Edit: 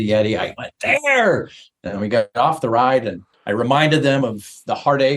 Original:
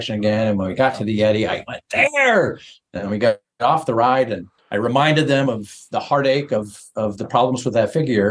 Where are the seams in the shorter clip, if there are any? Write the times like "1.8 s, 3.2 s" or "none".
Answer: 2.3 s

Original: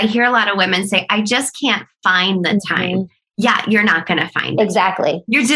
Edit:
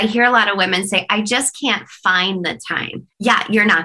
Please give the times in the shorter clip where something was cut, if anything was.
2.9 s

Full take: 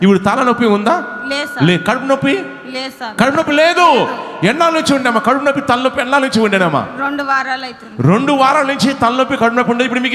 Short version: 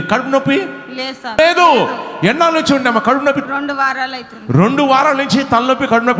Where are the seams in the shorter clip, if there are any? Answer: 1.4 s, 3.4 s

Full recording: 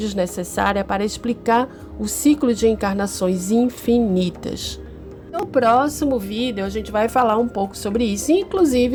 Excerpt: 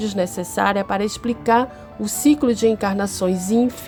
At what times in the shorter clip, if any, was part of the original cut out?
none

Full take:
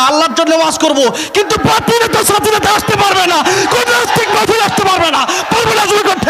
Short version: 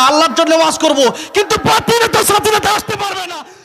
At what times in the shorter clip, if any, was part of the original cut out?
none

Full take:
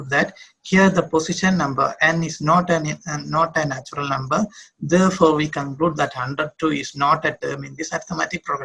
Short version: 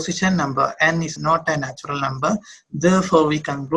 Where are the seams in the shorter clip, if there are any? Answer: 1.1 s

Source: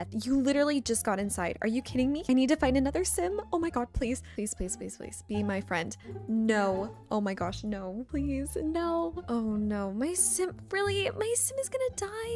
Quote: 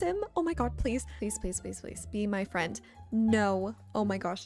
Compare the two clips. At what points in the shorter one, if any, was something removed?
none

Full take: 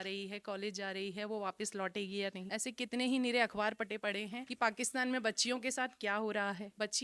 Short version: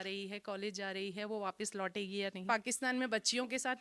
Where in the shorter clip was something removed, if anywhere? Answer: 2.4 s

